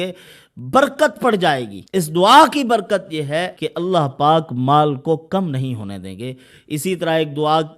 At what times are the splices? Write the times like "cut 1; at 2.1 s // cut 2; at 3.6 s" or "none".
cut 1; at 1.8 s // cut 2; at 3.6 s